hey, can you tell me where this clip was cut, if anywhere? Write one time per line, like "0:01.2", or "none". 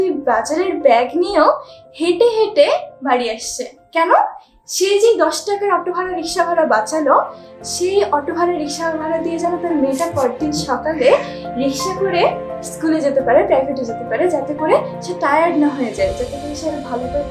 none